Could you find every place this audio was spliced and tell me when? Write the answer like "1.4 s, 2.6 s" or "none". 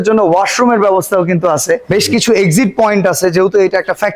none

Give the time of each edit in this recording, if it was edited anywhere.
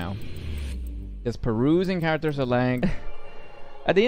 2.8 s

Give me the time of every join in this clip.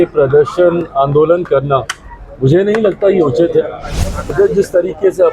4.3 s

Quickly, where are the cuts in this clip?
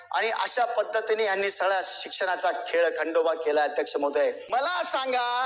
4.4 s

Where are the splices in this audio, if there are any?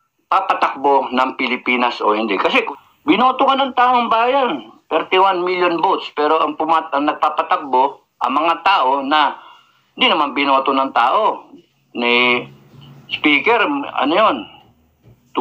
2.7 s

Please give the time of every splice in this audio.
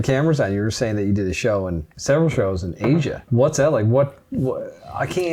1.9 s, 3.3 s

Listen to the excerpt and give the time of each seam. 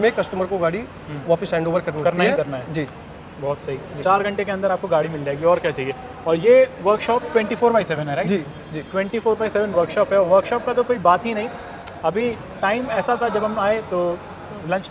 none

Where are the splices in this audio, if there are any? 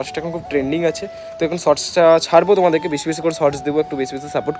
none

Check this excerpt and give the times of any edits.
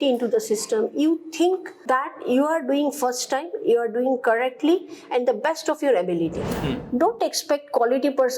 1.7 s, 6.8 s

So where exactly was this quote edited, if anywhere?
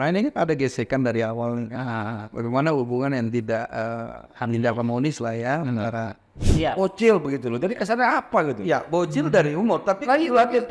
6.5 s

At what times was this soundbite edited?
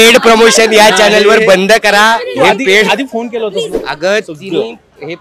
3.8 s

